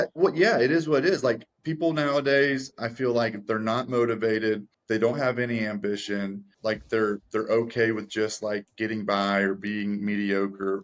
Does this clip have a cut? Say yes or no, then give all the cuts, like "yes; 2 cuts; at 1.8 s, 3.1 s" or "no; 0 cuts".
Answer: yes; 2 cuts; at 4.7 s, 6.5 s